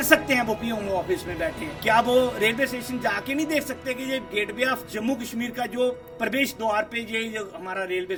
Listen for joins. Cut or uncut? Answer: uncut